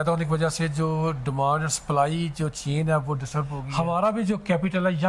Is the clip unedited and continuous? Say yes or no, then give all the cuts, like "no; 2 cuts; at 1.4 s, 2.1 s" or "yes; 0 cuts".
no; 1 cut; at 3.6 s